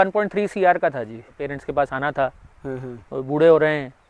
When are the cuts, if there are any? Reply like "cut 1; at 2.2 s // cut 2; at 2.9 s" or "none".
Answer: cut 1; at 1.5 s